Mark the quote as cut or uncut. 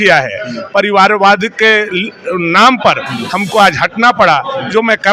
uncut